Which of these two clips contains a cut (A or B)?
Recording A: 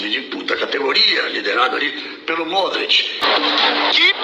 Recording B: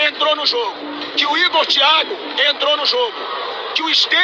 A